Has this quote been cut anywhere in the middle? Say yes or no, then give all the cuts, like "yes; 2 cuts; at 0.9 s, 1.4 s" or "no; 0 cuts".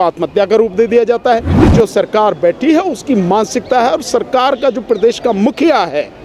yes; 1 cut; at 1.5 s